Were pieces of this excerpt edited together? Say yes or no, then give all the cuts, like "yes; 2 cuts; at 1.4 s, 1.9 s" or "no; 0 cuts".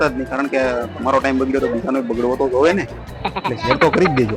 no; 0 cuts